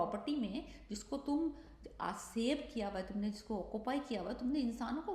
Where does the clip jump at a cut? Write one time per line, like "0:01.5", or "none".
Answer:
none